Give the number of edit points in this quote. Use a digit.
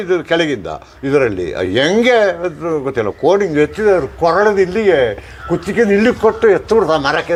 0